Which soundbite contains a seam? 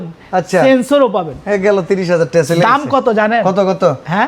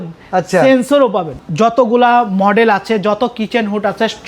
second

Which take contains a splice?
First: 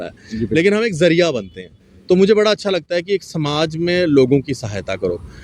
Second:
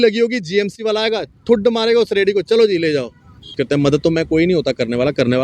second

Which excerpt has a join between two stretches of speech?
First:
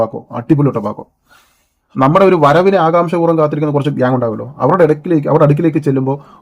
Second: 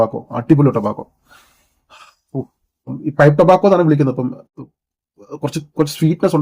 first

